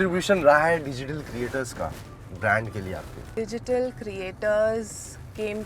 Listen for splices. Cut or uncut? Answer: cut